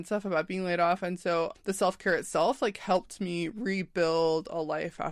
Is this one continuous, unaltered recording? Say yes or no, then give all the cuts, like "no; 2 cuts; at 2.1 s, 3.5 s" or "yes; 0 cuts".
no; 1 cut; at 1.6 s